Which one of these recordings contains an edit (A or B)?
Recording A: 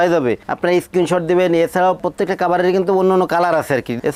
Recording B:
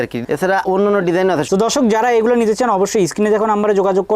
B